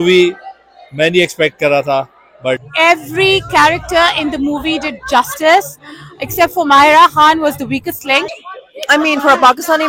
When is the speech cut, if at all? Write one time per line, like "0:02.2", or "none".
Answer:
0:02.7
0:08.5